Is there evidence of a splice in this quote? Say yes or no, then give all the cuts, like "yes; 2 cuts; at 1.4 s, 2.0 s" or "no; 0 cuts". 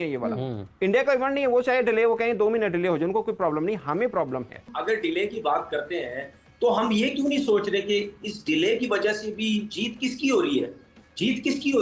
yes; 1 cut; at 4.7 s